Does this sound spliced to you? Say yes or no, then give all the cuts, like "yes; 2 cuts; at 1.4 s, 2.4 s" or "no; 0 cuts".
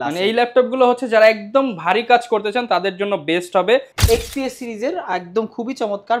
yes; 1 cut; at 3.9 s